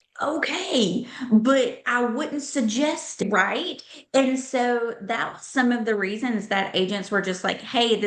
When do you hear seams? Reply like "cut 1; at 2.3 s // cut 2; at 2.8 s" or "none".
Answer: cut 1; at 3.2 s